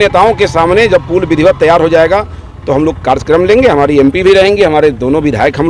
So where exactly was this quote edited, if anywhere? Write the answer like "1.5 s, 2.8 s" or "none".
none